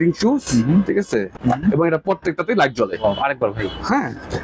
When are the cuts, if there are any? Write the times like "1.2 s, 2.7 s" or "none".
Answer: 1.4 s